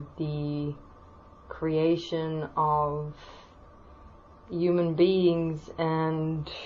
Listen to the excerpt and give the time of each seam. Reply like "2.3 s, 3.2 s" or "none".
none